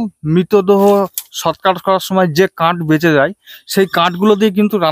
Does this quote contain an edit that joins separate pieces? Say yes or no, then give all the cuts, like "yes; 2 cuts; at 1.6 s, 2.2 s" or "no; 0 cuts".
no; 0 cuts